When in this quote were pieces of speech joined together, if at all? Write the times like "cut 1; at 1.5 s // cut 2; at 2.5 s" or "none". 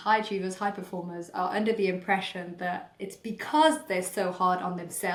none